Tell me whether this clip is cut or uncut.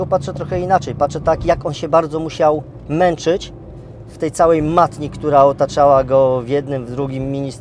uncut